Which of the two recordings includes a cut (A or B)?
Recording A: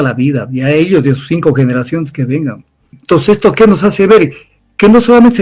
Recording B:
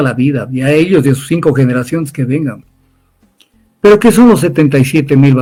A